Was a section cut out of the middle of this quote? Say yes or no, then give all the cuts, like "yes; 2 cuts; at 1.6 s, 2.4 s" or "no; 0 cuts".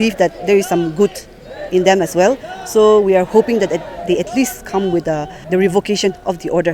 yes; 1 cut; at 5.3 s